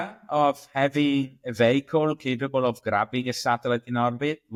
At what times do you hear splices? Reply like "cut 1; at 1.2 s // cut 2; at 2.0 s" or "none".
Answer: none